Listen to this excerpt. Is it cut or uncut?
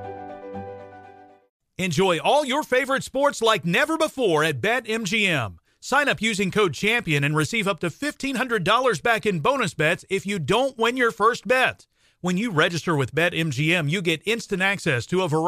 uncut